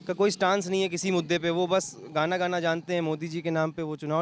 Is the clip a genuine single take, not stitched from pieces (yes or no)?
yes